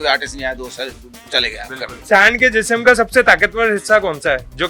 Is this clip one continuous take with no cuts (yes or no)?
no